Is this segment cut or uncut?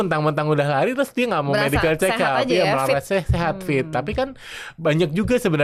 uncut